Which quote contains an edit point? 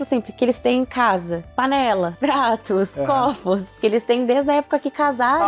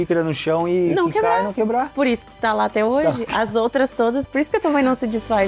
first; 1 cut; at 3.8 s

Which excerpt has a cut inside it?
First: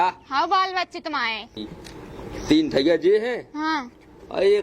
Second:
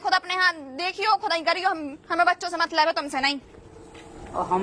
first; 1 cut; at 1.7 s

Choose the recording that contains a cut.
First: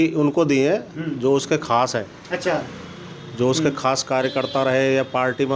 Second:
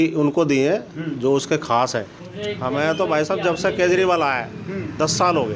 second; 1 cut; at 2.2 s

